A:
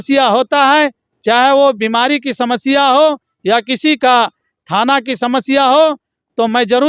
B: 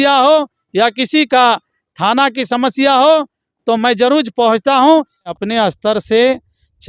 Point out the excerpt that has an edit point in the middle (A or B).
B